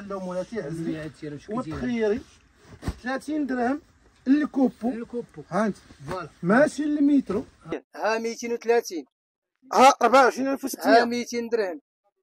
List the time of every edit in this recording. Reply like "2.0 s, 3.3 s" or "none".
7.8 s